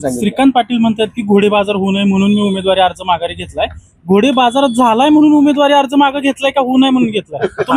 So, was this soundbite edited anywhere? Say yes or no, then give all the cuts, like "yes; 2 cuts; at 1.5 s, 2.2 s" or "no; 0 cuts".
no; 0 cuts